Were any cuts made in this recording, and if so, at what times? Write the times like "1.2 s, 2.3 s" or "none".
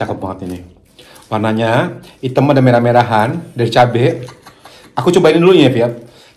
none